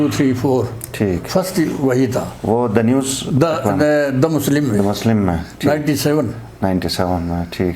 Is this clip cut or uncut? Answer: uncut